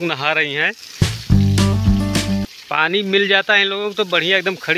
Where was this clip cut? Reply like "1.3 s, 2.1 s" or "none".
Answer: none